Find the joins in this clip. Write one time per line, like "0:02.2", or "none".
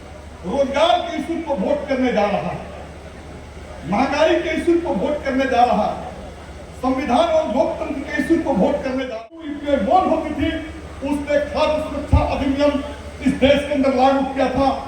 0:09.1